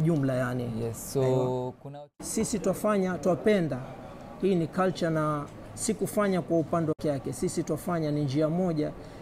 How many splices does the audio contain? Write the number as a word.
two